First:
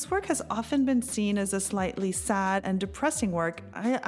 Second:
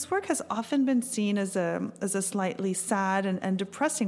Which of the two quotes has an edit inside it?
first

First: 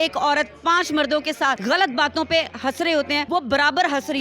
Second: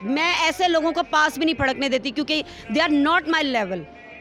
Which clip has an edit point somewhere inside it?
first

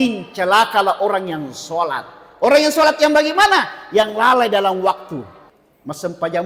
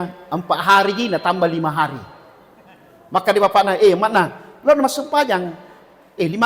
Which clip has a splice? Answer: first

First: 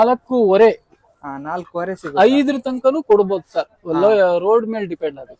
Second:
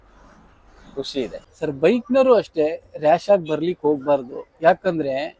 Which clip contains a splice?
second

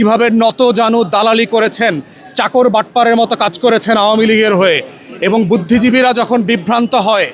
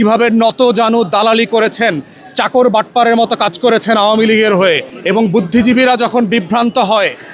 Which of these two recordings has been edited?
second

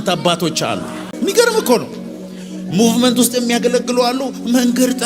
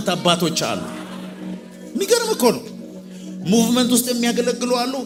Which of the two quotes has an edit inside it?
first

